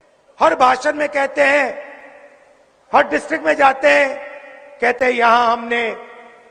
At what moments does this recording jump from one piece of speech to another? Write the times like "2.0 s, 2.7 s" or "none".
none